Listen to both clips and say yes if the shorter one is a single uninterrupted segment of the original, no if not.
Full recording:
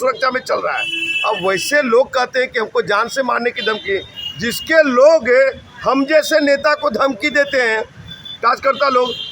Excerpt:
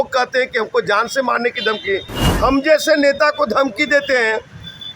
no